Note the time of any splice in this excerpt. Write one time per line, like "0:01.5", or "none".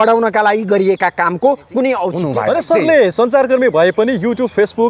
0:02.5